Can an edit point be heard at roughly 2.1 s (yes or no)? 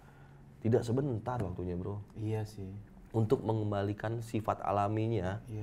no